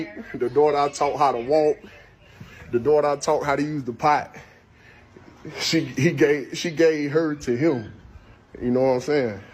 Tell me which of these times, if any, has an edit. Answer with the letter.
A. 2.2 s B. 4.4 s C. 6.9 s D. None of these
D